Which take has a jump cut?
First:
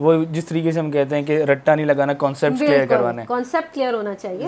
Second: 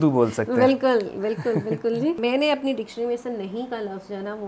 second; 1 cut; at 2.2 s

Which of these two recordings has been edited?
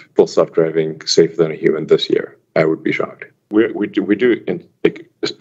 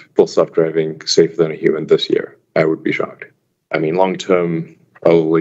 second; 1 cut; at 3.4 s

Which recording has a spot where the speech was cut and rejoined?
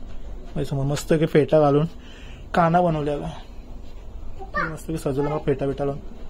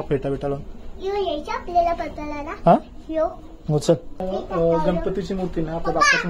second; 1 cut; at 4.1 s

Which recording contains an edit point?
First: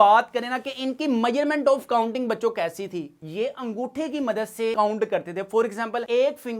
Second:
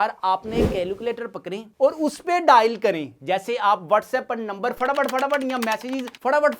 first; 1 cut; at 3.2 s

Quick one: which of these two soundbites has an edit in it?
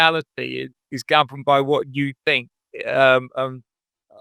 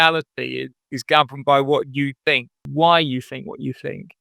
second; 1 cut; at 2.6 s

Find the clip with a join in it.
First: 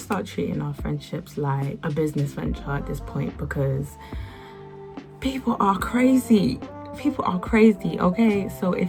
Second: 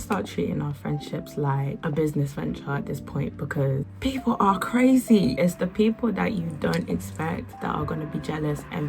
second; 3 cuts; at 3.9 s, 5.3 s, 7.5 s

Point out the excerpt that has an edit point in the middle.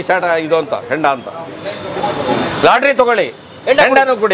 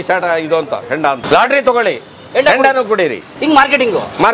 second; 2 cuts; at 1.2 s, 3.3 s

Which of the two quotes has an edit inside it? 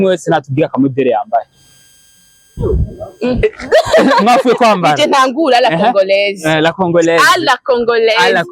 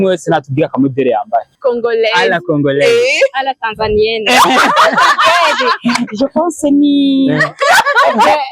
second; 1 cut; at 1.6 s

